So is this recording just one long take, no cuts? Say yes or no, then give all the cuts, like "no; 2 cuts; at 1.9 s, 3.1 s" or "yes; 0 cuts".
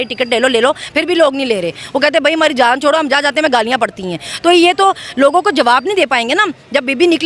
yes; 0 cuts